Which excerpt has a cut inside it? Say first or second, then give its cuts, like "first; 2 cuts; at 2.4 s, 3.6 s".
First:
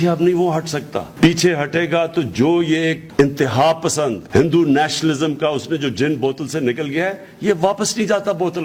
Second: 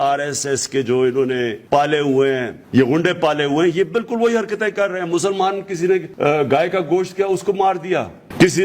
second; 3 cuts; at 1.6 s, 2.5 s, 6.1 s